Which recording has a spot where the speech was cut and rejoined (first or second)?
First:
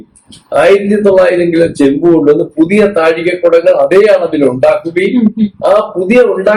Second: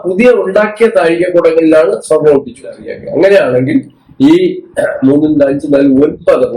second